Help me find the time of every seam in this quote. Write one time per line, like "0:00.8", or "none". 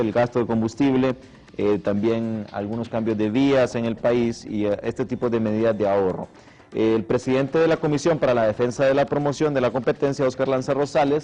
0:08.4